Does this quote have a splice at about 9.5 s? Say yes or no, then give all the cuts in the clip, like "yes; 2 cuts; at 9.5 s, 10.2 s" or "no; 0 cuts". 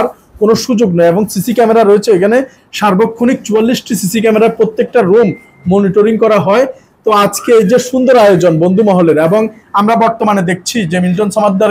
no; 0 cuts